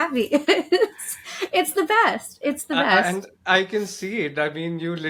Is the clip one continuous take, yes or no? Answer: yes